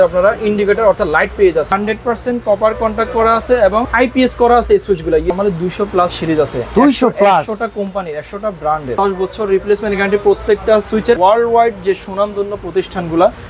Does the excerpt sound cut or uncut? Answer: cut